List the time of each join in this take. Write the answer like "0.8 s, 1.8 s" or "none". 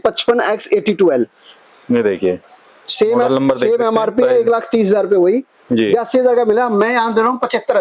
none